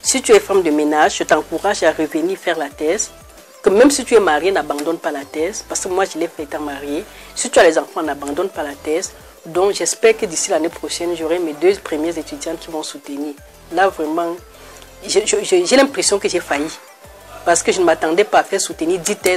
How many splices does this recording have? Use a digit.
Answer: 0